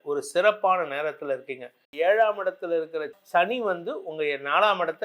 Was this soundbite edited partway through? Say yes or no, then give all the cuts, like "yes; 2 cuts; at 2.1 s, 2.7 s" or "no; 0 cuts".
yes; 1 cut; at 1.9 s